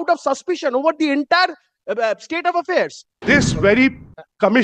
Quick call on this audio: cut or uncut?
cut